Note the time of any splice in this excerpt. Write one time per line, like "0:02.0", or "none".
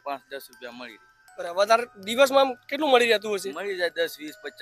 none